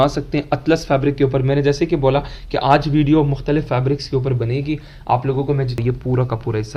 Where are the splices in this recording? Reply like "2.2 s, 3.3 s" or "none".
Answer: 5.8 s

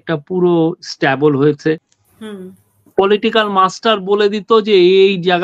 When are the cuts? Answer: 2.0 s

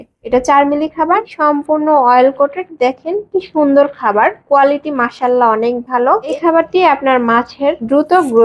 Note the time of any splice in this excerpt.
1.3 s, 6.3 s

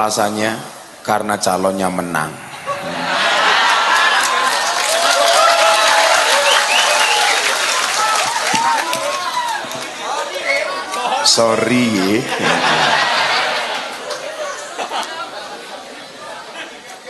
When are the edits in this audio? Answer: none

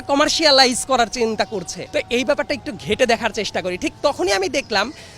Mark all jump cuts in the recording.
1.8 s

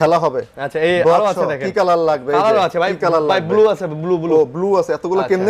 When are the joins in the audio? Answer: none

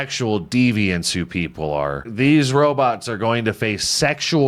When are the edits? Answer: 2.1 s

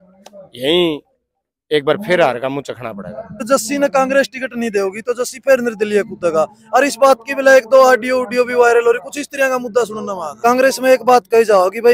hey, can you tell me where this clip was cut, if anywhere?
3.4 s, 10.3 s

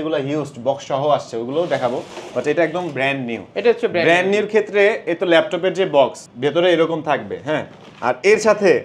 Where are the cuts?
none

